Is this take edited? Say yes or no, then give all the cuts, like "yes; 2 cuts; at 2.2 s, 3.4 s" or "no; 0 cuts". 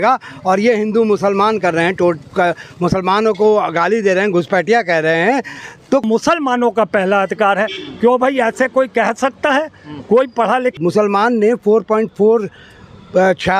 yes; 2 cuts; at 6.0 s, 10.8 s